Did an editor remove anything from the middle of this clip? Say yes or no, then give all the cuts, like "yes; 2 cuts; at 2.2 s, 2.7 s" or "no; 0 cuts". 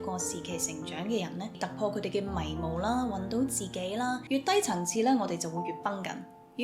yes; 2 cuts; at 1.5 s, 4.2 s